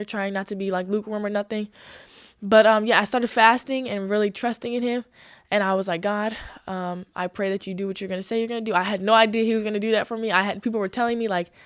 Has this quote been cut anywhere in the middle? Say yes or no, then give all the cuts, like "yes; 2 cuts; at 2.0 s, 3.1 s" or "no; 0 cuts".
no; 0 cuts